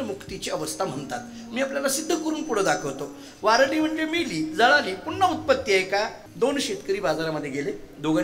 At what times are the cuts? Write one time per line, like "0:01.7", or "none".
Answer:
0:06.2